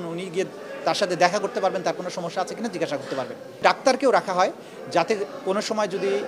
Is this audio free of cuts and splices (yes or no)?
no